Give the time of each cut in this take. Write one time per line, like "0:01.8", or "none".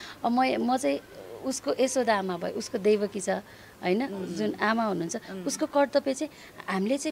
none